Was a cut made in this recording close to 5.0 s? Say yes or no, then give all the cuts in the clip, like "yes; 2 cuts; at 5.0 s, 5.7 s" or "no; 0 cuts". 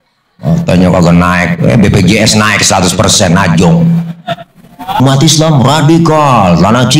yes; 1 cut; at 5.0 s